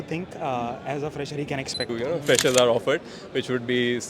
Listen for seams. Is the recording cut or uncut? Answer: cut